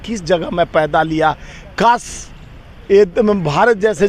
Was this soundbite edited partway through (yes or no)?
no